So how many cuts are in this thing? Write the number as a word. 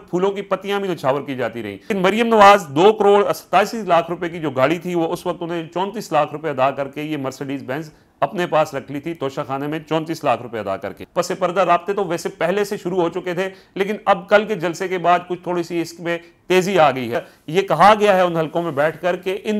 three